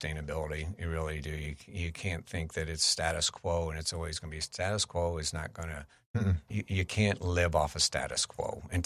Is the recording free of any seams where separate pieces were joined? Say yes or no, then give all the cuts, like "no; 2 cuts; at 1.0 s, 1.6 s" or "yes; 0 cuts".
yes; 0 cuts